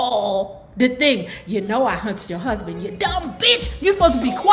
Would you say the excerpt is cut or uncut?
uncut